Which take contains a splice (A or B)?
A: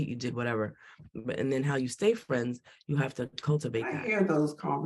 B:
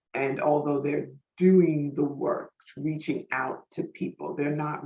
A